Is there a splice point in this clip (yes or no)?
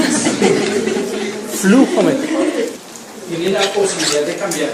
no